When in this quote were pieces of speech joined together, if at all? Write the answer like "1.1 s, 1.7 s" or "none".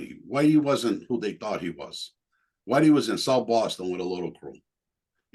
none